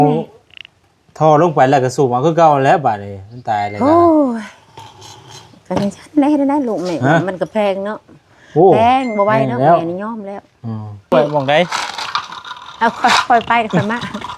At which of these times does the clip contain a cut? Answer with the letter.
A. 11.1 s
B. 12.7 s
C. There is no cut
A